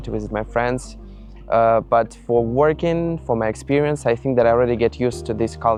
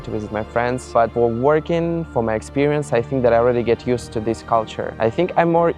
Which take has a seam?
second; 2 cuts; at 1.0 s, 4.8 s

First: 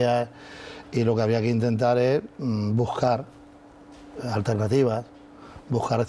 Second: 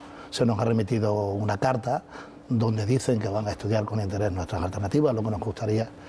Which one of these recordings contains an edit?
second; 1 cut; at 3.7 s

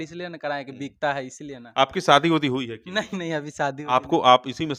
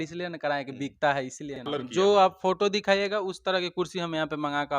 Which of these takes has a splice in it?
second; 1 cut; at 1.6 s

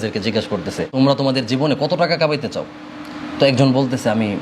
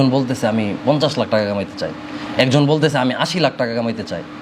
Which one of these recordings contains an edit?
first; 1 cut; at 0.9 s

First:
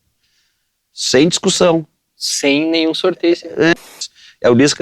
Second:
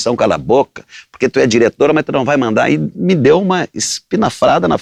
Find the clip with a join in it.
first; 1 cut; at 3.9 s

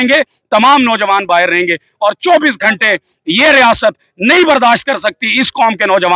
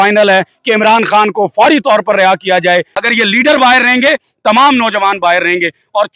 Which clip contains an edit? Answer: second; 1 cut; at 3.0 s

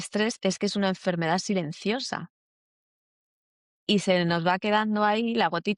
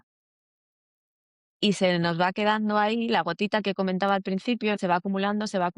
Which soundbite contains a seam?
second; 1 cut; at 4.8 s

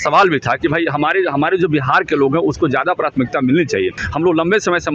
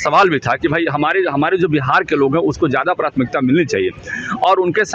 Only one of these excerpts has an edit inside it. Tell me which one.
first; 1 cut; at 4.0 s

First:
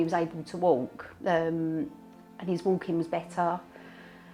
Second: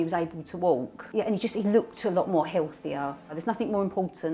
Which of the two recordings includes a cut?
second; 2 cuts; at 1.0 s, 3.4 s

